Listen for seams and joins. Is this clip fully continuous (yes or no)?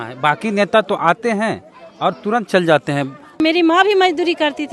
no